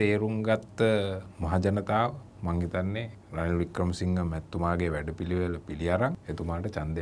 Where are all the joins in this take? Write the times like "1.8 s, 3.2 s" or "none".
2.3 s, 3.2 s, 6.2 s